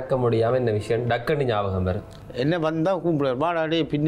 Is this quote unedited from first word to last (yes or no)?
no